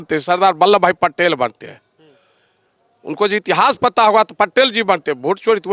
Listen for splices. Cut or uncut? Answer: uncut